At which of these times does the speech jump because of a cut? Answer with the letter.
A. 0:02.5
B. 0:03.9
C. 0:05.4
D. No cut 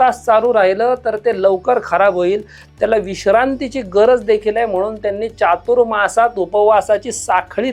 D